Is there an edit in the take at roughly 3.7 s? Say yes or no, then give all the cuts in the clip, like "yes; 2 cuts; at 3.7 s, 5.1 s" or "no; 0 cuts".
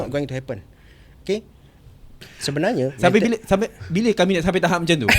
no; 1 cut; at 2.4 s